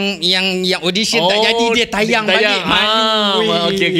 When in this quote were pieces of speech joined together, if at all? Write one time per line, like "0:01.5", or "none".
none

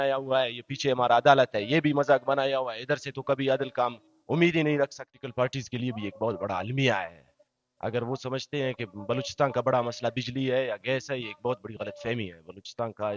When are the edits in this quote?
0:05.1

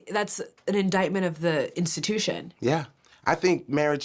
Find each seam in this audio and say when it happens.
0:03.0

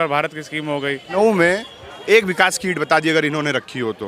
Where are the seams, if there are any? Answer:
0:01.0

